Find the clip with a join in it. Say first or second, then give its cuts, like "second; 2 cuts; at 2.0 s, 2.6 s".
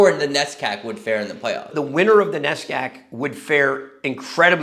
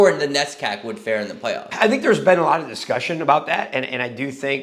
first; 1 cut; at 1.7 s